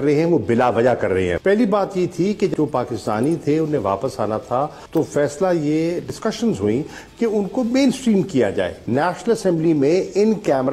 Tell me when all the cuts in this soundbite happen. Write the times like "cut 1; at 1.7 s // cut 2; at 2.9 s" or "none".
cut 1; at 1.4 s // cut 2; at 2.5 s // cut 3; at 4.8 s // cut 4; at 6.1 s // cut 5; at 8.8 s